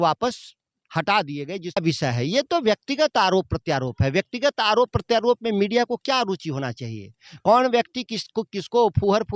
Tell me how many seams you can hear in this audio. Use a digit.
1